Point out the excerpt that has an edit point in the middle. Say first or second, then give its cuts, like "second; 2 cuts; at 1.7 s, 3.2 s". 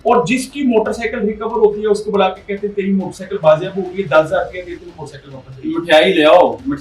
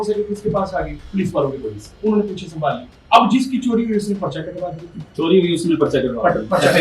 second; 3 cuts; at 1.0 s, 2.9 s, 5.0 s